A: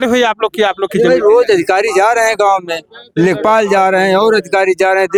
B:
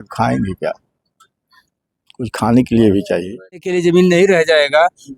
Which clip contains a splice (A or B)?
B